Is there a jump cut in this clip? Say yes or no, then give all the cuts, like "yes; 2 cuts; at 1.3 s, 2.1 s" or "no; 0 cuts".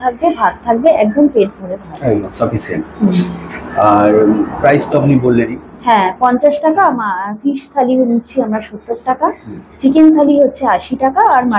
no; 0 cuts